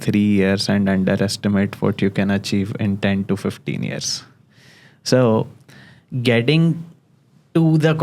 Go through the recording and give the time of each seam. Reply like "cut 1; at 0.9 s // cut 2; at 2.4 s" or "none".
none